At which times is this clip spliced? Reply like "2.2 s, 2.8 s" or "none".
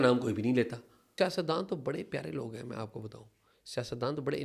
1.2 s